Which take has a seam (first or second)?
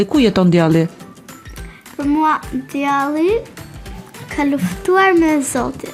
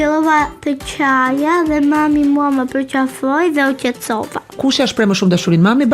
second